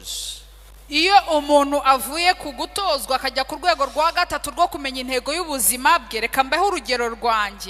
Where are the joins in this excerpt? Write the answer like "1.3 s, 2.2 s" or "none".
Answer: none